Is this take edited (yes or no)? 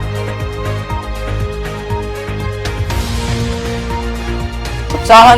yes